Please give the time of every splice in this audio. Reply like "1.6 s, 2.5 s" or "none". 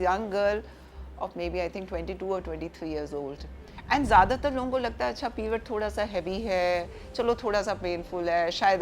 3.5 s